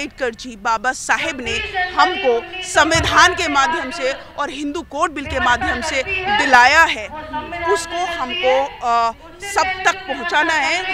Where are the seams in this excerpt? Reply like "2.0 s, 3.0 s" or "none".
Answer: none